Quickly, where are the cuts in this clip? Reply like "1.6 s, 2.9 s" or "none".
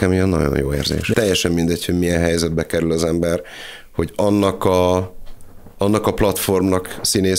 1.1 s